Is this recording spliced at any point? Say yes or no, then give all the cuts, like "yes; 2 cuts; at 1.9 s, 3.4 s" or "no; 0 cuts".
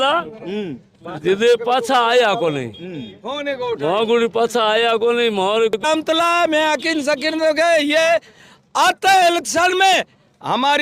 yes; 1 cut; at 5.7 s